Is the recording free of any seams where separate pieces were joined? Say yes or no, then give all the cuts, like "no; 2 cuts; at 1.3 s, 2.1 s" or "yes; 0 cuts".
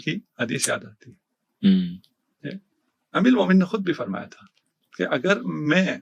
yes; 0 cuts